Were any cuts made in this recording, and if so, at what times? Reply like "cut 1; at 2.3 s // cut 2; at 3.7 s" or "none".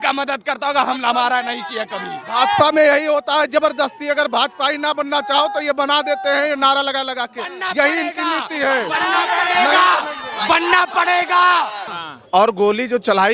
cut 1; at 11.9 s